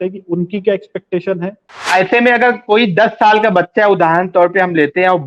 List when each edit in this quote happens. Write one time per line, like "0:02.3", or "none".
0:01.8